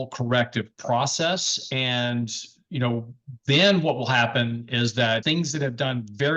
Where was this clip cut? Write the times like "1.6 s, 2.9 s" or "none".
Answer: 5.2 s